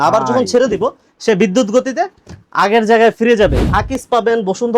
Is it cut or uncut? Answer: cut